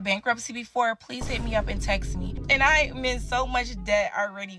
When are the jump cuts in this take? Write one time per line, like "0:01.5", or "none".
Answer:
0:02.4